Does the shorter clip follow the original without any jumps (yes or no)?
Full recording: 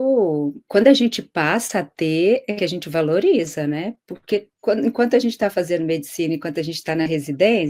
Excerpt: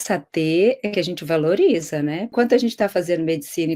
no